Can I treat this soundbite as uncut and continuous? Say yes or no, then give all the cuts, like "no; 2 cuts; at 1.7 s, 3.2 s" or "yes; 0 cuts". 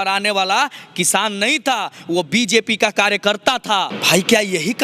no; 1 cut; at 3.9 s